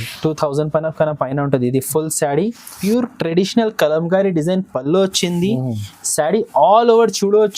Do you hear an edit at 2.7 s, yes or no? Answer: yes